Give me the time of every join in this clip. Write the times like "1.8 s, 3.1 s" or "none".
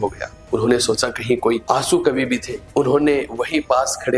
1.6 s